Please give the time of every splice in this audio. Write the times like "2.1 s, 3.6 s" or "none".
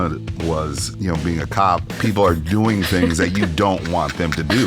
0.8 s, 1.9 s